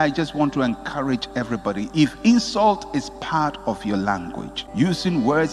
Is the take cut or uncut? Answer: cut